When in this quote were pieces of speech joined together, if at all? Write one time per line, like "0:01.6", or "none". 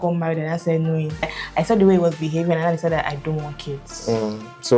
0:01.3